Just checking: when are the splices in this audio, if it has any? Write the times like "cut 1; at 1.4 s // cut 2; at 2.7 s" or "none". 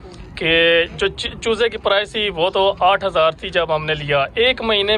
none